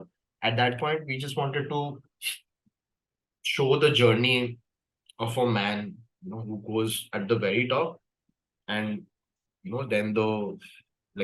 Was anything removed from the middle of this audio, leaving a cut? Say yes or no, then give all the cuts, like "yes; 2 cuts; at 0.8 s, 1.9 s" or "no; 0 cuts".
no; 0 cuts